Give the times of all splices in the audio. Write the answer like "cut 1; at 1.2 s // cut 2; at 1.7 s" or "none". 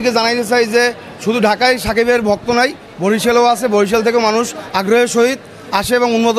none